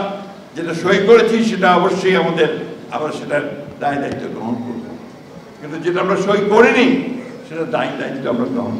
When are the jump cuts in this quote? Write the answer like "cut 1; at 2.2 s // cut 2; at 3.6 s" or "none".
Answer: none